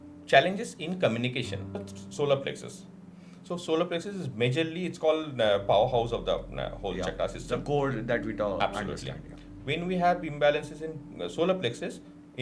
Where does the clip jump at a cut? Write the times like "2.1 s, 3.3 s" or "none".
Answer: 1.9 s